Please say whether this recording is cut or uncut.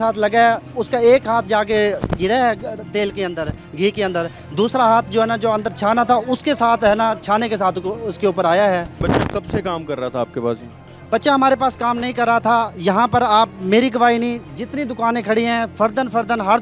uncut